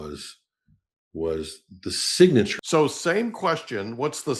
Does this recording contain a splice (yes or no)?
yes